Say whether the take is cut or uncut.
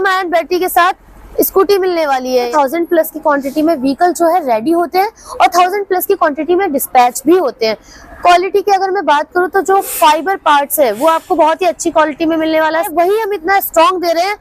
cut